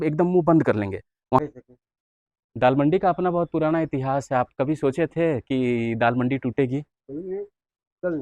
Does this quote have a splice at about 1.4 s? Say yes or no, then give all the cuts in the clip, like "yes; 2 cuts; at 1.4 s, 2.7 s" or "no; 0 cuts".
yes; 1 cut; at 1.4 s